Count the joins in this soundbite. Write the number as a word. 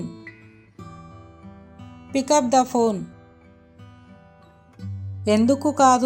two